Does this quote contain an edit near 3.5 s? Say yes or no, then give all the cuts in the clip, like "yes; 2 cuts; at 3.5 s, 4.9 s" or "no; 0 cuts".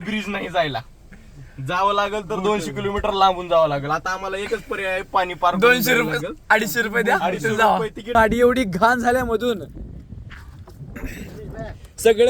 no; 1 cut; at 8.1 s